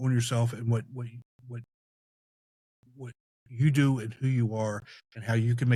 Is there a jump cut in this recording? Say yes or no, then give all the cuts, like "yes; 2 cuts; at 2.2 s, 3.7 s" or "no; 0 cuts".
no; 0 cuts